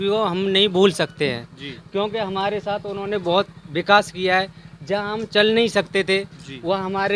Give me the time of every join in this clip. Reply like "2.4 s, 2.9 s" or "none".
none